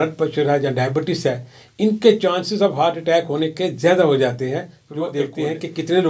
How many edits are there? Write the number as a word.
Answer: one